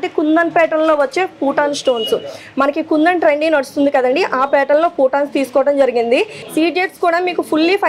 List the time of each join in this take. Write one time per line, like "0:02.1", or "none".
0:06.4